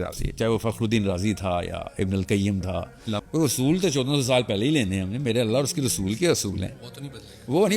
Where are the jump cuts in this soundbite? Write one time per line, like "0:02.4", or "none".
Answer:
0:03.2